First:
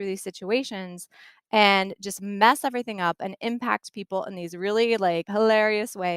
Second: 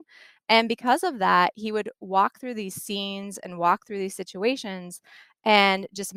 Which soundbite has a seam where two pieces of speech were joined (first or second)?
first